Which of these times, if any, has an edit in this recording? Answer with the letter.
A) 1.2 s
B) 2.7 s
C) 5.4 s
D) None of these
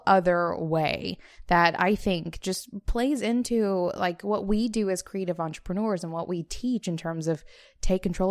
D